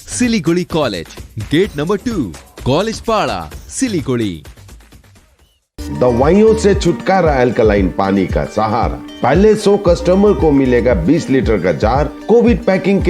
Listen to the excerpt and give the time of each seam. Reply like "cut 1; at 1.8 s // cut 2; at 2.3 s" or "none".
none